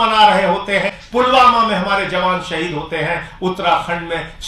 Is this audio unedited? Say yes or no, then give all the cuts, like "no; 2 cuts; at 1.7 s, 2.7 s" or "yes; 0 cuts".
no; 1 cut; at 1.0 s